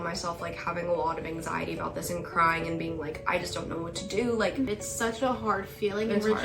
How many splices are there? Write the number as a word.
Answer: one